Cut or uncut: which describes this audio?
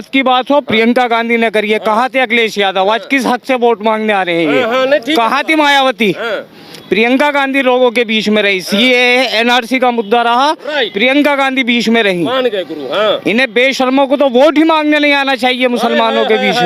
uncut